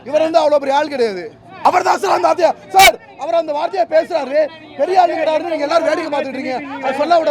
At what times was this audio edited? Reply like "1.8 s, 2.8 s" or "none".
1.5 s